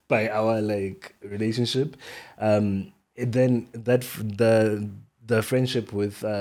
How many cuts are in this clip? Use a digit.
0